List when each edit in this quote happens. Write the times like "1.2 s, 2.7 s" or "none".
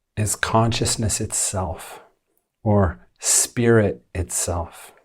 none